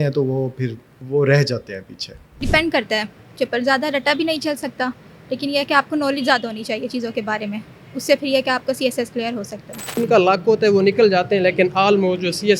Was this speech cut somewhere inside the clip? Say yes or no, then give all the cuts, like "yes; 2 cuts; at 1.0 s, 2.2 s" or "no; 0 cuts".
yes; 2 cuts; at 2.4 s, 10.0 s